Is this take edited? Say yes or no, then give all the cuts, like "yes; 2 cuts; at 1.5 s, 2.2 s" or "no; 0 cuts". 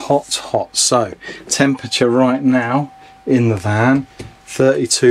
no; 0 cuts